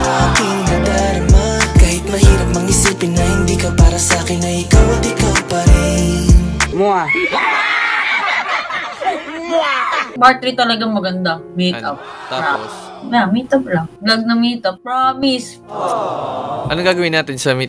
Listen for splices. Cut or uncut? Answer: cut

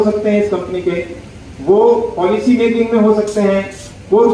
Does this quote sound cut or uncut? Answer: uncut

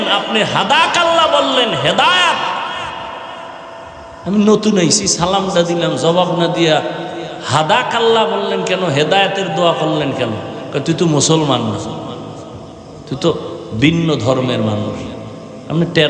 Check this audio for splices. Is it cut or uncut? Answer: uncut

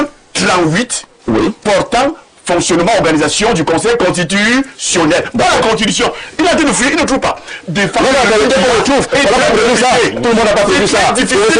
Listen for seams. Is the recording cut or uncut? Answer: uncut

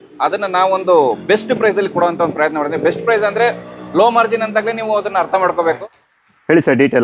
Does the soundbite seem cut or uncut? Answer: cut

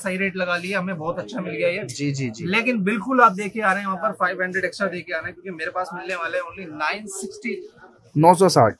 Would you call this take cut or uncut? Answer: uncut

